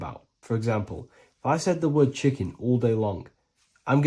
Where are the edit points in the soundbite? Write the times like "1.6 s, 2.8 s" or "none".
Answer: 2.5 s